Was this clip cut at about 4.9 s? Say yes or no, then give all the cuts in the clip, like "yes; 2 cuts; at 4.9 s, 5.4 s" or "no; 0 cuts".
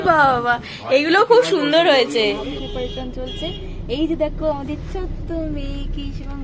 no; 1 cut; at 2.6 s